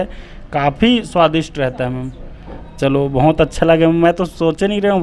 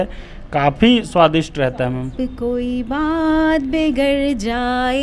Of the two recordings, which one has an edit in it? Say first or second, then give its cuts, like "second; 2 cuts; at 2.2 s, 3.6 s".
second; 1 cut; at 2.1 s